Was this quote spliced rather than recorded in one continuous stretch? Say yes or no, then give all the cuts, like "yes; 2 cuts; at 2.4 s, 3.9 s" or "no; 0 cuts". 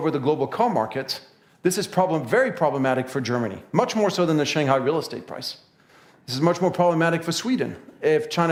no; 0 cuts